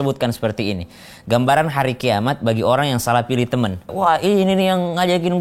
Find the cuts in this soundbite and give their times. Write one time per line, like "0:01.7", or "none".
0:03.9

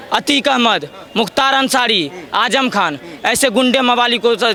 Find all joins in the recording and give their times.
none

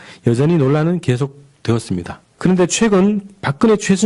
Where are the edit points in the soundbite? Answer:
0:01.5

